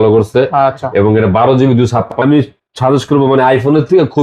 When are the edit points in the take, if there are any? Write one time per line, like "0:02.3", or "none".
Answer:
0:02.1